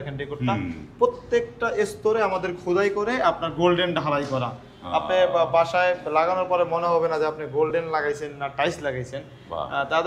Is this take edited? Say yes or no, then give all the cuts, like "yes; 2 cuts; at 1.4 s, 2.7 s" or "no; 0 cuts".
no; 0 cuts